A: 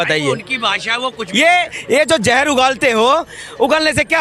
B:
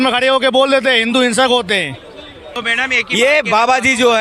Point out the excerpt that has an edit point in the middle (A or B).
B